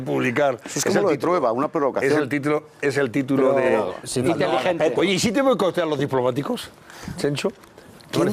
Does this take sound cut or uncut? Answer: uncut